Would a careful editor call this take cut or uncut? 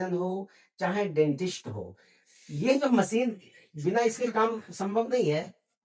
uncut